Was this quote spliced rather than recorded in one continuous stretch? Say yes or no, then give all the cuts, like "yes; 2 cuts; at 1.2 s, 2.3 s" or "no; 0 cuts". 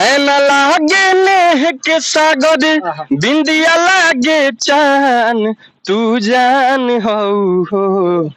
no; 0 cuts